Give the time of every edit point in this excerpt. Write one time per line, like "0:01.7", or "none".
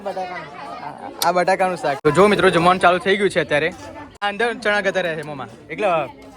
0:02.0
0:04.2